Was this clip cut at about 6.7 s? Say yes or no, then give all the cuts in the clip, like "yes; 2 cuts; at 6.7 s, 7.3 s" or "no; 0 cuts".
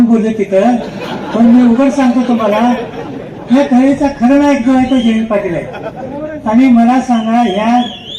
no; 0 cuts